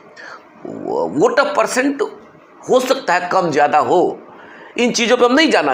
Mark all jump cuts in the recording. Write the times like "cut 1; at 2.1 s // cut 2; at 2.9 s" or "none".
none

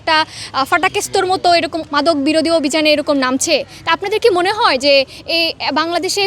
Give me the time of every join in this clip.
cut 1; at 1.8 s

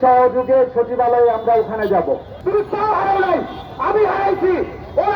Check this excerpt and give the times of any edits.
cut 1; at 2.4 s

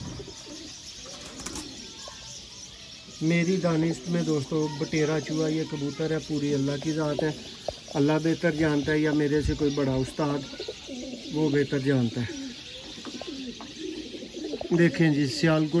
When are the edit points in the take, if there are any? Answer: none

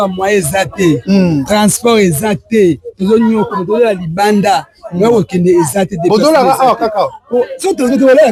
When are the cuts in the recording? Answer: none

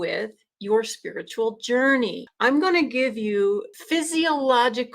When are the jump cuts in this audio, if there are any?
cut 1; at 2.2 s // cut 2; at 3.7 s

